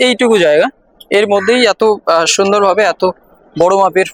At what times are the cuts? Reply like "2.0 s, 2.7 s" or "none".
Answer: none